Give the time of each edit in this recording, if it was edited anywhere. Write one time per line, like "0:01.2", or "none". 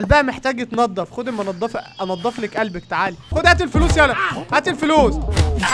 0:03.3